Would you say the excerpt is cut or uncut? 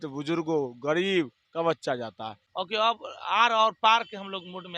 cut